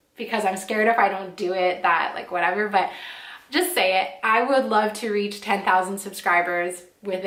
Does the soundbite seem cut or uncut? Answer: uncut